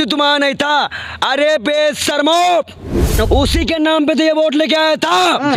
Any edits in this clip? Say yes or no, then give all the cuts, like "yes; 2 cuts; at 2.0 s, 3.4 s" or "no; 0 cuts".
yes; 1 cut; at 3.1 s